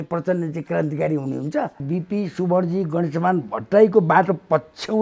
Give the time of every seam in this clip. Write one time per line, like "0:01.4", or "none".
0:01.9